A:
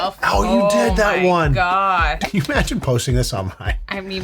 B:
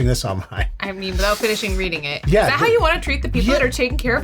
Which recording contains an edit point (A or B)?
A